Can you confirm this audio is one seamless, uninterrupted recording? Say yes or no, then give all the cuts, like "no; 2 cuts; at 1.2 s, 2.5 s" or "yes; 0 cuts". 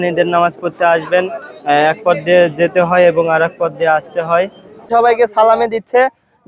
no; 1 cut; at 4.9 s